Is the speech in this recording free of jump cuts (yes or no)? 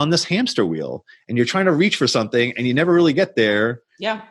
yes